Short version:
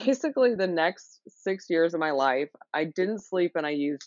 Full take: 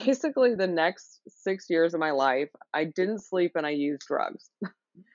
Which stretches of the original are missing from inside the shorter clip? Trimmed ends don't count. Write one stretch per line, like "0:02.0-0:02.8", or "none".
none